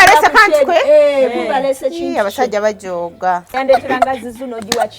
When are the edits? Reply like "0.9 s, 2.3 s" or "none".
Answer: 3.6 s

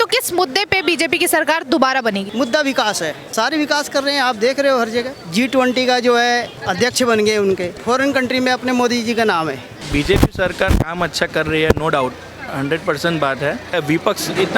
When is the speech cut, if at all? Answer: 2.3 s, 3.2 s, 5.2 s, 6.6 s, 7.7 s, 9.8 s, 13.7 s

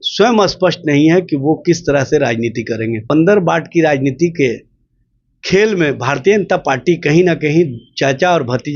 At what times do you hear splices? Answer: 3.0 s

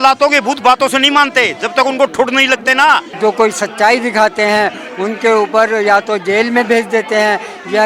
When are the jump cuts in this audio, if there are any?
3.1 s

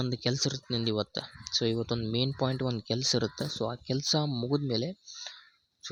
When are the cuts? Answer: none

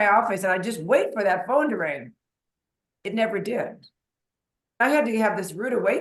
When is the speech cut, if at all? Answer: 4.8 s

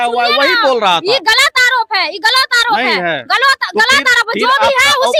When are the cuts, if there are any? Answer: none

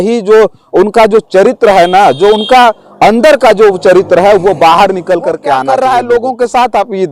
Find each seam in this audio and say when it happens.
5.6 s

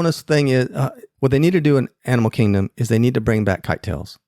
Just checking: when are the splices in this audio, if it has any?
1.0 s

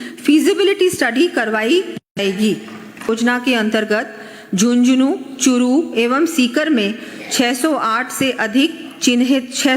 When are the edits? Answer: 3.1 s

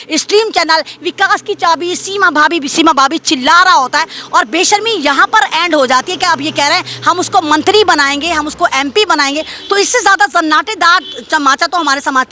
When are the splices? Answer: none

